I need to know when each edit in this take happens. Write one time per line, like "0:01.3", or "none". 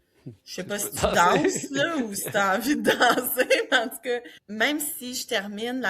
0:04.4